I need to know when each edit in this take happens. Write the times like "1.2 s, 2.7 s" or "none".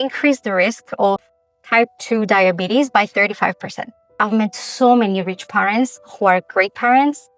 4.2 s